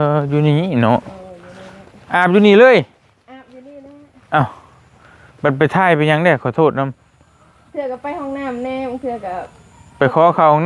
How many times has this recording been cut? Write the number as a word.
zero